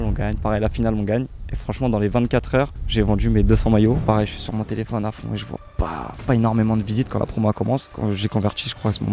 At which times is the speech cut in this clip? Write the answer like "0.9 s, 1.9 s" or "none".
4.0 s, 7.9 s